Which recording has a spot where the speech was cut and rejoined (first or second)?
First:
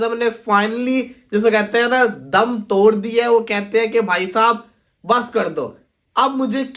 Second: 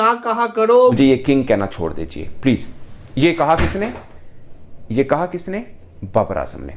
second